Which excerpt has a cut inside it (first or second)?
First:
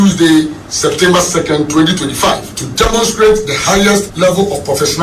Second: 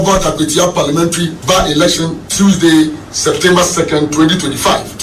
first